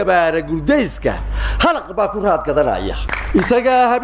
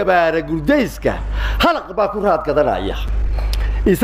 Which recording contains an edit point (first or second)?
first